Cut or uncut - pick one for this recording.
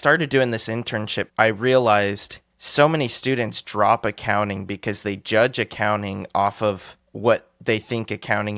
uncut